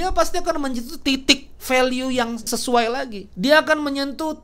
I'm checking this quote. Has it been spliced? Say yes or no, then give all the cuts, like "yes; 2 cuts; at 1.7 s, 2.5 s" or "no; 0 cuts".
yes; 2 cuts; at 2.4 s, 3.2 s